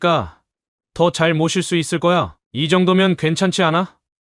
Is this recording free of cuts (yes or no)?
no